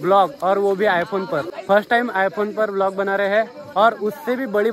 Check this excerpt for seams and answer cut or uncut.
uncut